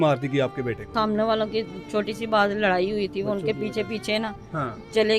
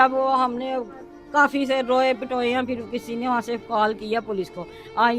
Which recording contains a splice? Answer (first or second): first